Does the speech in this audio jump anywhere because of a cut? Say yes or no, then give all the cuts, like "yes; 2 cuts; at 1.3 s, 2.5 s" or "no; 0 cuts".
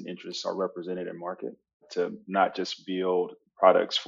yes; 1 cut; at 1.8 s